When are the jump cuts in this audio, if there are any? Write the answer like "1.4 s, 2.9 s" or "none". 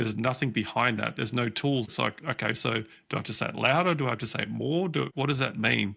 1.9 s, 5.1 s